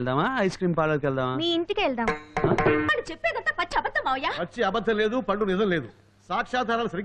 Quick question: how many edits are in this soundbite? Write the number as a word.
one